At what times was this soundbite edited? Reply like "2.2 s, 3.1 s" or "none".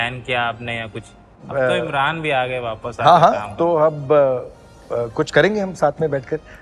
1.4 s